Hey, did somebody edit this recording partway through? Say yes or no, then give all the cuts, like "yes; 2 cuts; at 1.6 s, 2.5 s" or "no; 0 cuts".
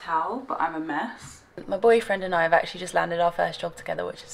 yes; 1 cut; at 1.6 s